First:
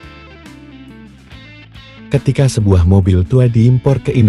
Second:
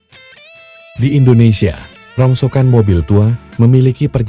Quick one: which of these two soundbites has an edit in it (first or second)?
second